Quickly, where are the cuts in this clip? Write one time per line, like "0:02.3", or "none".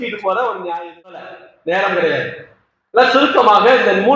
0:01.3